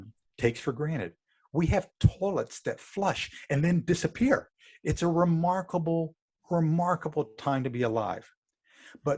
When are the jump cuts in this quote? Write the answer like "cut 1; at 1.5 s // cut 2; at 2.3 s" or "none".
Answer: none